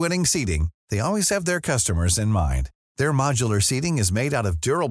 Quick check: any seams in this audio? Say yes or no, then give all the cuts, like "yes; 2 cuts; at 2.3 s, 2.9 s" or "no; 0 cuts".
no; 0 cuts